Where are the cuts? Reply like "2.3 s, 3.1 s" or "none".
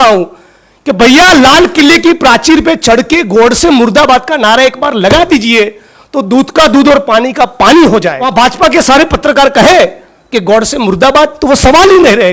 8.2 s